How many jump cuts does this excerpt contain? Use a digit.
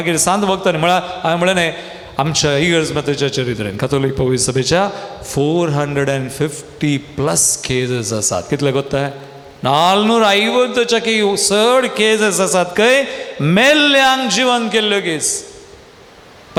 0